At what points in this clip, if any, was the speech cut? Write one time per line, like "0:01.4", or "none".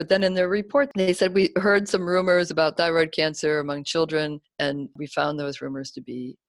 0:04.4